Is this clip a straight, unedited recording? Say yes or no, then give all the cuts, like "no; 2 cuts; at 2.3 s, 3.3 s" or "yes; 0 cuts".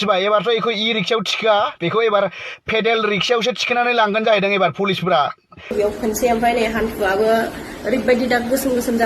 no; 1 cut; at 5.7 s